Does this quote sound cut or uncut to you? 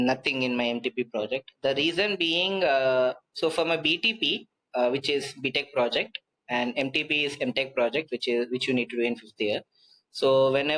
uncut